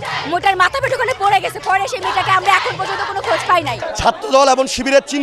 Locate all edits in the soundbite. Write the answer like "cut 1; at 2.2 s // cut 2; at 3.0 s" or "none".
cut 1; at 3.8 s